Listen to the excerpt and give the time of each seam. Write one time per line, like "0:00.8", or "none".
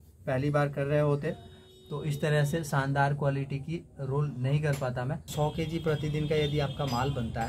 0:05.2